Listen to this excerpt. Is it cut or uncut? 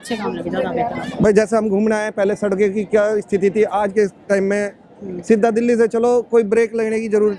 uncut